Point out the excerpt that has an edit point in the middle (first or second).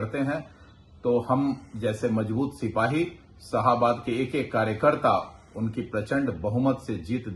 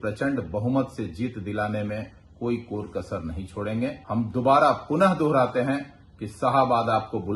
second